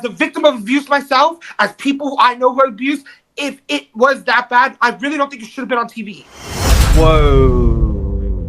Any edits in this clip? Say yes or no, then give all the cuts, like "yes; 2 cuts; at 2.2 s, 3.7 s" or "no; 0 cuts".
no; 0 cuts